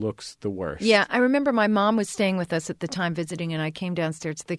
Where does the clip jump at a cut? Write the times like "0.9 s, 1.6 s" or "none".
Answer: none